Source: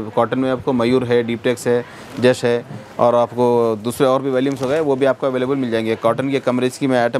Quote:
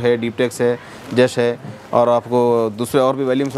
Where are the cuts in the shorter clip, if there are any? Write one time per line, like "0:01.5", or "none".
none